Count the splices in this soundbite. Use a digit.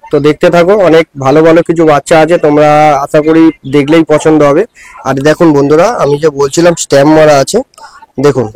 0